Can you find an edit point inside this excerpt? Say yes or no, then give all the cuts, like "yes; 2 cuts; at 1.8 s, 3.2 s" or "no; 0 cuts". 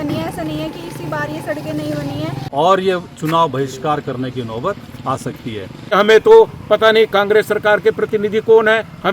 yes; 2 cuts; at 2.4 s, 5.9 s